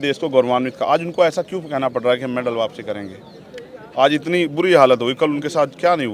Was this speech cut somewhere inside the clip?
no; 0 cuts

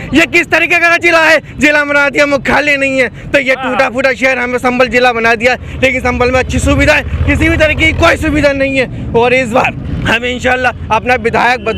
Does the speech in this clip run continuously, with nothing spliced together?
yes; 0 cuts

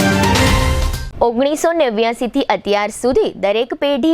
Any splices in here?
yes; 1 cut; at 0.9 s

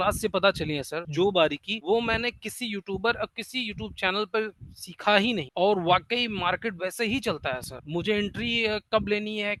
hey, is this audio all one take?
yes; 0 cuts

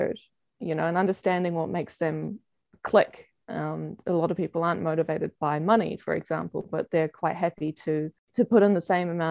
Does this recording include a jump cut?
yes; 1 cut; at 8.2 s

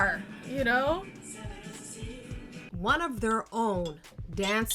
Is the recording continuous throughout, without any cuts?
no; 1 cut; at 2.7 s

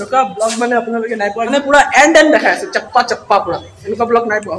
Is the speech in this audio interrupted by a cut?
yes; 1 cut; at 1.5 s

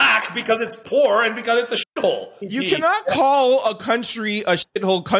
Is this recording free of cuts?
no; 1 cut; at 2.3 s

